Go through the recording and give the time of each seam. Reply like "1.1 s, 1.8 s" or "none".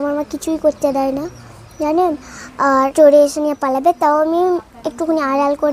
2.9 s

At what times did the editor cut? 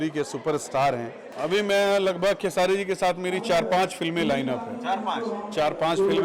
1.3 s

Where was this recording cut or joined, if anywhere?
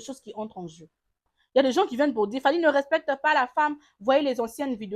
1.3 s

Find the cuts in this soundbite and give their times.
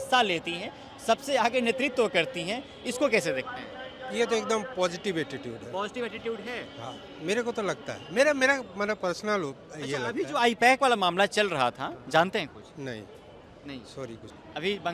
none

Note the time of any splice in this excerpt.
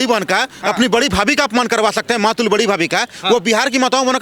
none

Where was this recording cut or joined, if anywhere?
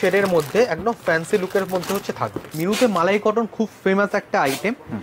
2.4 s

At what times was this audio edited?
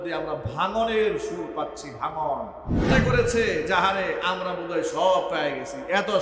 2.9 s

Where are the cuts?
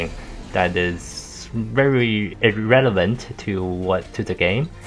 2.3 s

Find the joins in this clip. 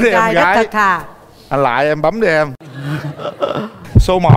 none

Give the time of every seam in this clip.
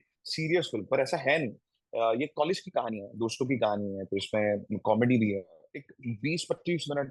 5.7 s

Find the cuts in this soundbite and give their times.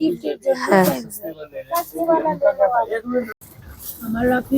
3.6 s

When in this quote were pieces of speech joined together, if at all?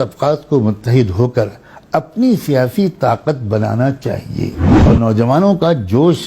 4.7 s

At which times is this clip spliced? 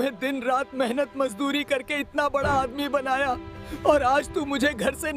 none

